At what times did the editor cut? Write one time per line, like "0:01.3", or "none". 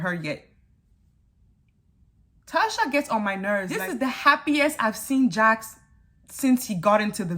0:03.8